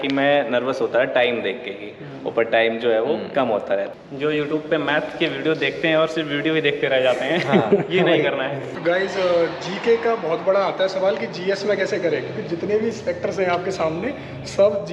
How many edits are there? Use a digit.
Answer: 2